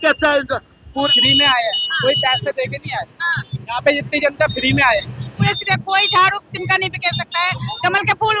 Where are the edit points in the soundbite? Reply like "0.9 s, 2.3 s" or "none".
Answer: 1.1 s, 5.5 s